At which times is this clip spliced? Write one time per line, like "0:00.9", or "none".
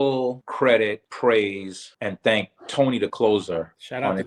none